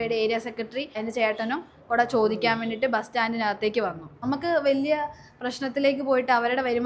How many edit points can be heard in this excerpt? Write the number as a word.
two